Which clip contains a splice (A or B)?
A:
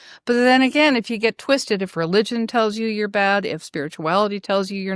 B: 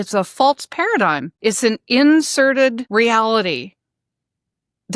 B